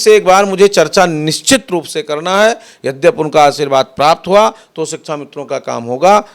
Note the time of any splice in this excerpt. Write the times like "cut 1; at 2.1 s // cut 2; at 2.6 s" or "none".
none